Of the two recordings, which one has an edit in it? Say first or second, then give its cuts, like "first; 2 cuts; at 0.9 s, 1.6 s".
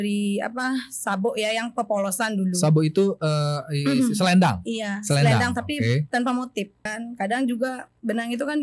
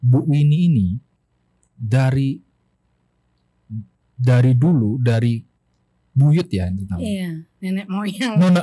first; 1 cut; at 7.0 s